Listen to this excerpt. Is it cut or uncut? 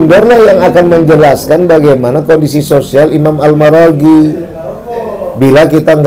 uncut